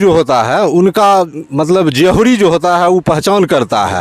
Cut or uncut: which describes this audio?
uncut